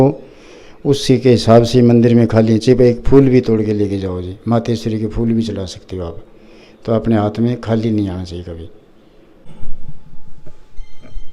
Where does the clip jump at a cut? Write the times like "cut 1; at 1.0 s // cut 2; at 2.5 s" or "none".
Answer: cut 1; at 9.4 s